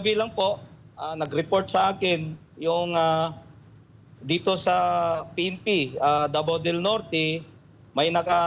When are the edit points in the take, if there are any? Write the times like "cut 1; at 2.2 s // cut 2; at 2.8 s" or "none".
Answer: none